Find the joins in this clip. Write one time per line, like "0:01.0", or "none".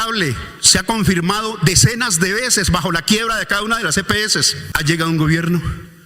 0:04.6

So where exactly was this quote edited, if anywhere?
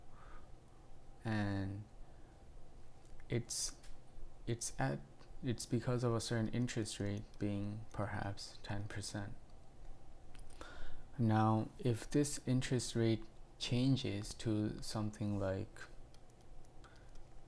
0:14.3

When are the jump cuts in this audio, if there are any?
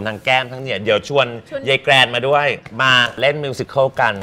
0:03.1

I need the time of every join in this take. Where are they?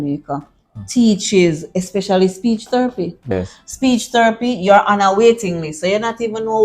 0:03.3

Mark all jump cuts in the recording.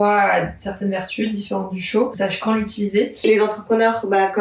0:02.1
0:03.2

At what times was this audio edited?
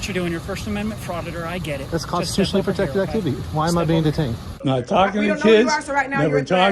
0:04.5

